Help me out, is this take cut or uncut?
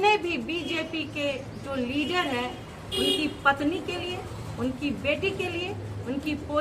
uncut